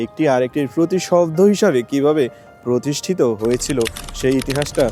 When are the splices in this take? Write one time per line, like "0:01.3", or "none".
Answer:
none